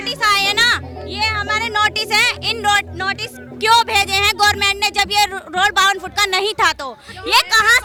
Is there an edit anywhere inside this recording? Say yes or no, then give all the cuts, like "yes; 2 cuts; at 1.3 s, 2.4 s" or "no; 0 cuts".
no; 0 cuts